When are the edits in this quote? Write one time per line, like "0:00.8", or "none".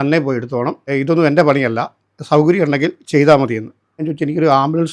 0:00.9
0:04.0